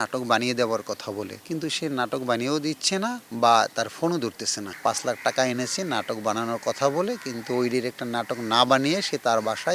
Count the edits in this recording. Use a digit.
1